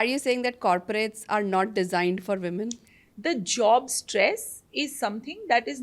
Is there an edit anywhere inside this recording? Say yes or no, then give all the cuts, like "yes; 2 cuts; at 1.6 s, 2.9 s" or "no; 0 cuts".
no; 0 cuts